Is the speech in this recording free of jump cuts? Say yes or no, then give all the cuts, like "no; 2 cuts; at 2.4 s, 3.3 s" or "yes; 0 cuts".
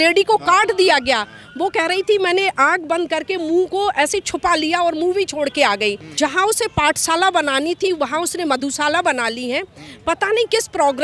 no; 1 cut; at 6.1 s